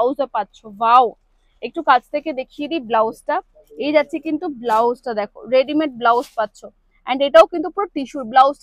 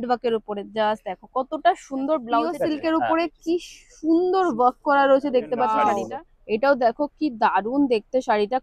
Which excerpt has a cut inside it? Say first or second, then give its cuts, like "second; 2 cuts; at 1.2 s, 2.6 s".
second; 2 cuts; at 2.5 s, 5.8 s